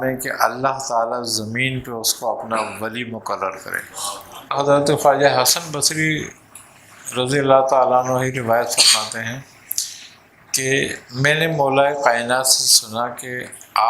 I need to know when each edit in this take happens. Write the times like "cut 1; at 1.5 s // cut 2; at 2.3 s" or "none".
cut 1; at 4.6 s